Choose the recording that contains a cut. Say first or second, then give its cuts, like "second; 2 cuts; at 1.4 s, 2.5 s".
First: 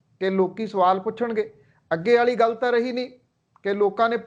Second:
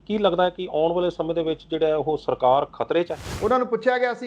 second; 1 cut; at 3.2 s